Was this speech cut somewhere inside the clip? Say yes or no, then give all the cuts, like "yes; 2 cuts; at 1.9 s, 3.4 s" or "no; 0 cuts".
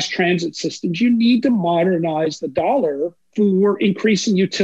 yes; 1 cut; at 3.2 s